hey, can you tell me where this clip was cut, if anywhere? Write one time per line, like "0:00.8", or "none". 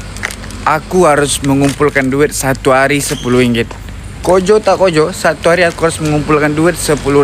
none